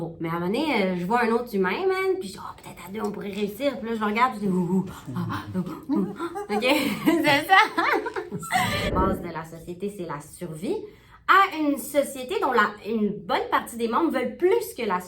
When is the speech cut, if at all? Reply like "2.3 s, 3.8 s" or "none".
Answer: 8.9 s